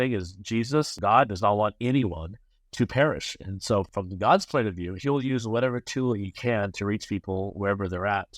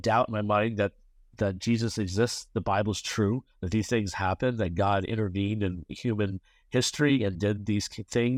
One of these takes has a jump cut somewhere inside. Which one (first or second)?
first